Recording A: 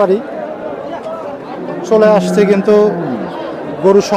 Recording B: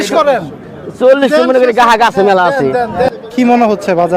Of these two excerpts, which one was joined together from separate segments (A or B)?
B